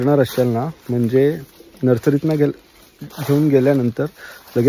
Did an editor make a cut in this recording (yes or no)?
no